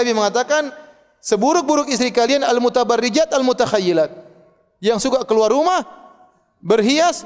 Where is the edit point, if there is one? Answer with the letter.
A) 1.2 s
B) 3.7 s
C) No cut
C